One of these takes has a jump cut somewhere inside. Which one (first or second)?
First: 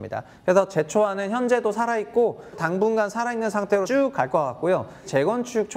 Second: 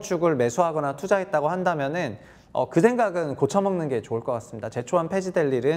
first